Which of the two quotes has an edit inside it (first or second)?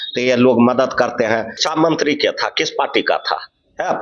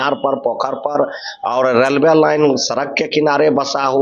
first